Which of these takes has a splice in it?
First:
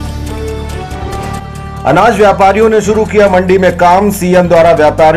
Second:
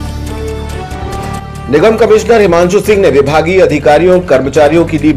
second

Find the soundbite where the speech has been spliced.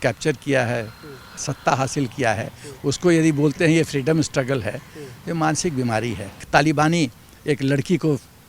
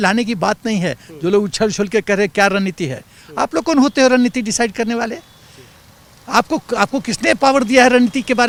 first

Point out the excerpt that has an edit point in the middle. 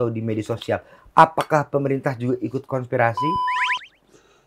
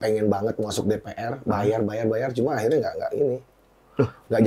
first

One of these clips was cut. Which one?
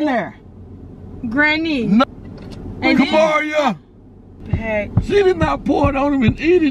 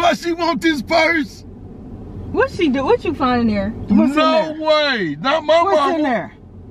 first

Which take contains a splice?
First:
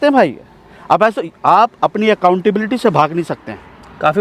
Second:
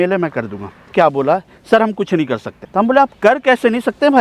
second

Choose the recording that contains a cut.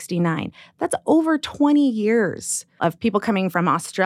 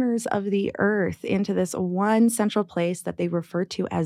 first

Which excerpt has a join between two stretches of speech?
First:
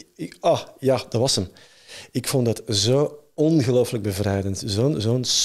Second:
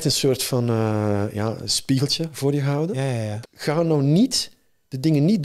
second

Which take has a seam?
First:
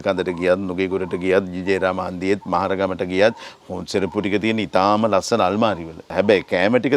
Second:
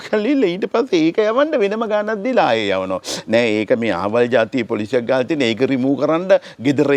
first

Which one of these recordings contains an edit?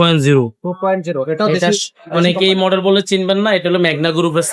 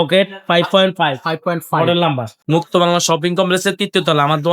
second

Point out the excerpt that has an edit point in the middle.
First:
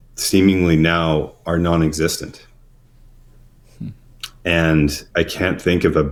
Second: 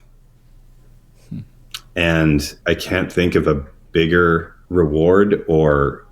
second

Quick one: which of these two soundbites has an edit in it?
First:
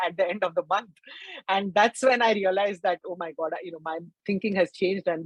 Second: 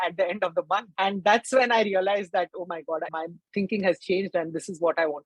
second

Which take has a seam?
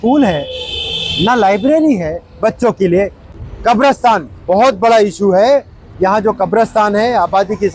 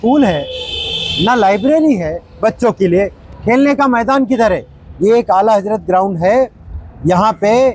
first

